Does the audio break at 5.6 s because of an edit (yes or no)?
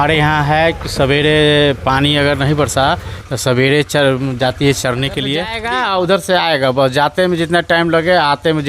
yes